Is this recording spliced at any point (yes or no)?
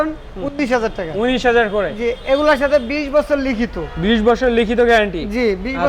no